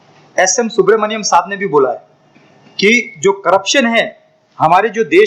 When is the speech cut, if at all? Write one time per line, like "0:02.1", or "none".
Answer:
none